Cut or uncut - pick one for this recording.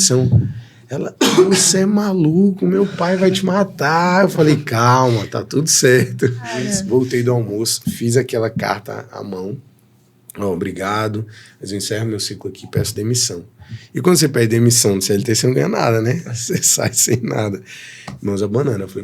cut